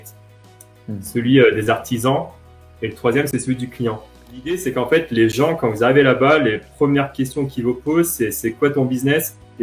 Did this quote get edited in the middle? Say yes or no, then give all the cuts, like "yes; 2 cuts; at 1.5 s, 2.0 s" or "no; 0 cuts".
yes; 1 cut; at 4.5 s